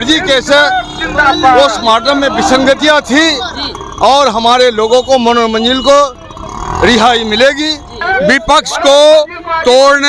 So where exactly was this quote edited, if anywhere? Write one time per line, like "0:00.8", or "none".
0:08.1